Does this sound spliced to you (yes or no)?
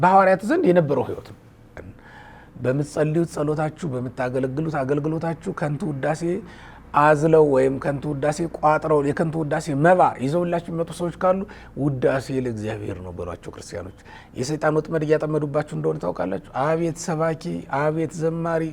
yes